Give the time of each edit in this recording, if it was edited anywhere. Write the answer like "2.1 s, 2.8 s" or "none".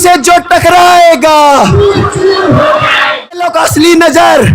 3.5 s